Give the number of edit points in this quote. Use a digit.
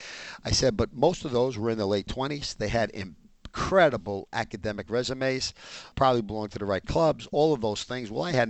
1